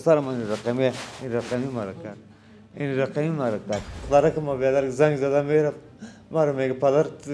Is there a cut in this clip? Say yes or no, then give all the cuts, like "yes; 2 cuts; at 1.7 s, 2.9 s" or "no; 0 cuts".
yes; 1 cut; at 4.0 s